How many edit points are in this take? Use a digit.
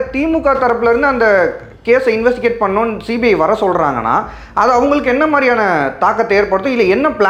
0